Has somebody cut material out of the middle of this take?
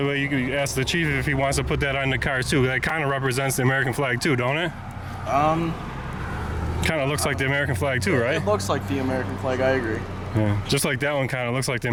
no; 0 cuts

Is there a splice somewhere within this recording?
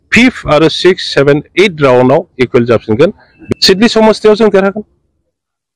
yes; 1 cut; at 3.5 s

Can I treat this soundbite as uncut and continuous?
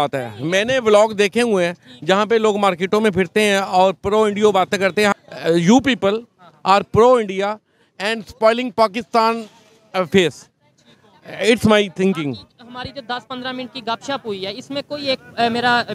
no; 1 cut; at 5.1 s

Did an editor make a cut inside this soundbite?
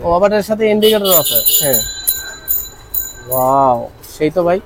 no; 0 cuts

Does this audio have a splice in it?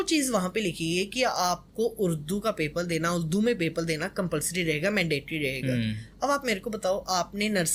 no; 0 cuts

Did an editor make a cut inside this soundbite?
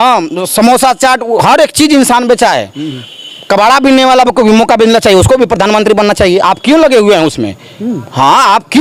no; 0 cuts

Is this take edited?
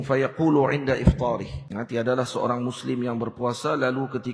yes; 1 cut; at 1.6 s

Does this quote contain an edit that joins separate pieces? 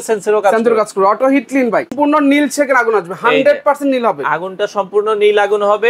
yes; 1 cut; at 1.9 s

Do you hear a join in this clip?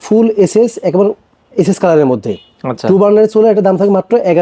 no; 0 cuts

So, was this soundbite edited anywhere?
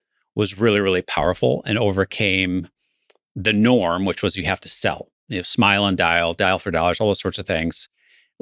yes; 1 cut; at 5.0 s

